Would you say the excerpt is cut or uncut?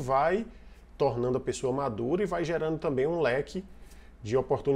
uncut